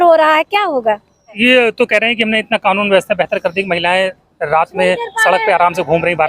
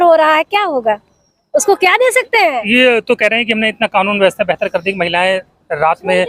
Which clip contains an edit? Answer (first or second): first